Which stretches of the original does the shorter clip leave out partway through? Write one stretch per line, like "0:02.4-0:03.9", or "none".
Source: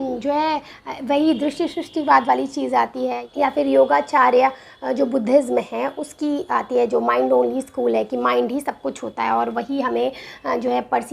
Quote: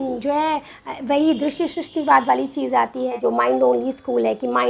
0:03.2-0:06.9